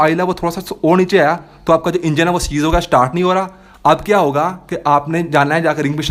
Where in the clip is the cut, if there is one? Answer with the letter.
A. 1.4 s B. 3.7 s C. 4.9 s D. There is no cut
D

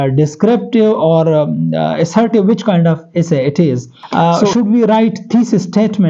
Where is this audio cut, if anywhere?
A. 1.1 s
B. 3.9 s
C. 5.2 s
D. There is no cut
B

